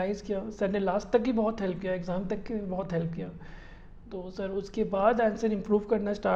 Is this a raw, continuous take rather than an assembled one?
yes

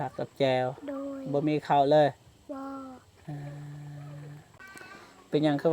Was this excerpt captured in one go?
no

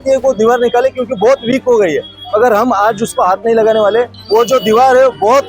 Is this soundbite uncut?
no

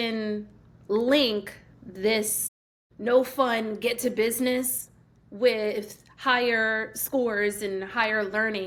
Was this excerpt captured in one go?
yes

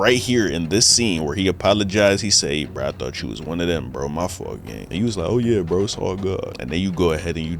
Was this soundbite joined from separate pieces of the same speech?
yes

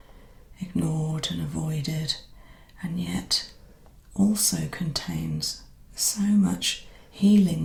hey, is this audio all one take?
yes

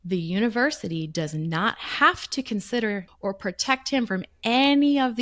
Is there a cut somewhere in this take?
yes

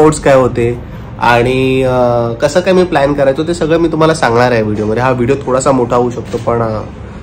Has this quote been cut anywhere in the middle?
no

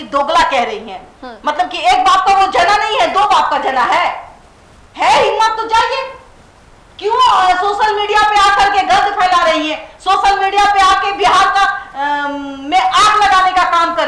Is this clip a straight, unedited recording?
yes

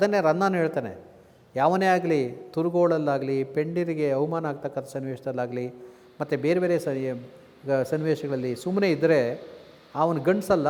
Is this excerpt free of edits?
yes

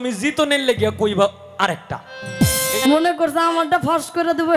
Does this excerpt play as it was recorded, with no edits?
no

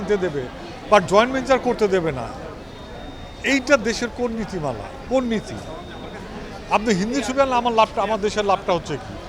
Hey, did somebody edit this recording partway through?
no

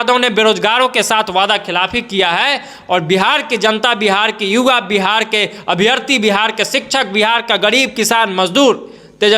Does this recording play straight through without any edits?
yes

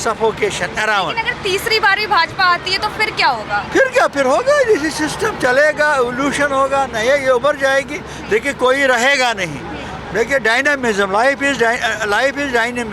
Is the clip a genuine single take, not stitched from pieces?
yes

